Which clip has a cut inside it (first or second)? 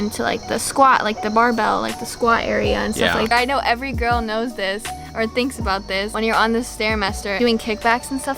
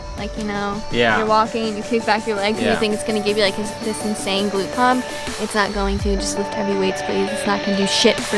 first